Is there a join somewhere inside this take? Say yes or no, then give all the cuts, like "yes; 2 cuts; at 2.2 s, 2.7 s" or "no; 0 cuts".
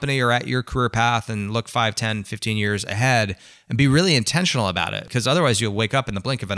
no; 0 cuts